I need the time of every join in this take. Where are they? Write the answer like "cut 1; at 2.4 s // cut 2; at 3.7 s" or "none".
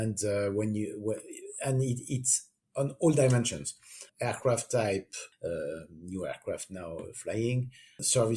cut 1; at 4.0 s